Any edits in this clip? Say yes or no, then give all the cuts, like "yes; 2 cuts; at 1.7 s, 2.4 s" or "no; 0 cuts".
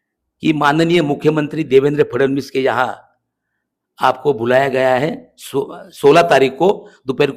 no; 0 cuts